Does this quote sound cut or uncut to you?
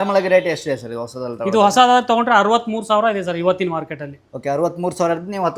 uncut